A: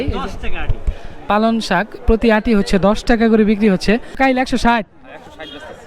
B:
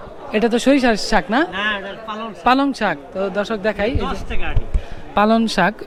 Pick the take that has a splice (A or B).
A